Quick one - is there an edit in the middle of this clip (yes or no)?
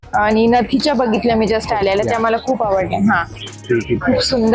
no